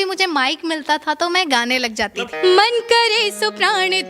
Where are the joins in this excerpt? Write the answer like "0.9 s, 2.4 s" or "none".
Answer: 2.2 s